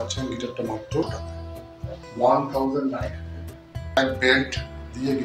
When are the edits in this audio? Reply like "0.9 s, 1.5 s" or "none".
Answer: 1.1 s, 4.0 s